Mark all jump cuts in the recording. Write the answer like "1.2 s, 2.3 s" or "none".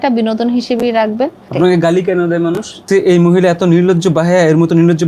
1.5 s, 2.8 s